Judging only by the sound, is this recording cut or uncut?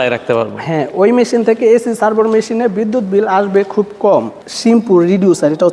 cut